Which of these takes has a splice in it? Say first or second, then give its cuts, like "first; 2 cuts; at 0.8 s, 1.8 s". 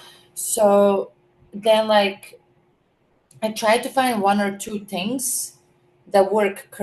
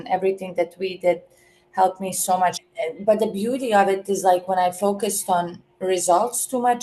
second; 1 cut; at 2.6 s